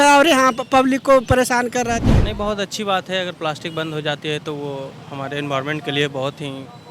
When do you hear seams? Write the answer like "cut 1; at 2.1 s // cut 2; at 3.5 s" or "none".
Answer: cut 1; at 2.1 s